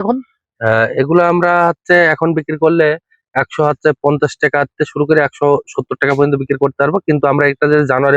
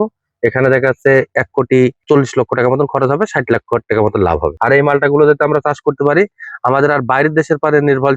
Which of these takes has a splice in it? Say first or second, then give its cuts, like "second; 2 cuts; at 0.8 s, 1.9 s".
second; 2 cuts; at 2.0 s, 4.6 s